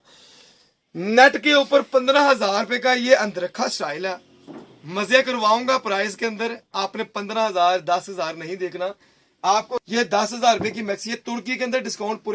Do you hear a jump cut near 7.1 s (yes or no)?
no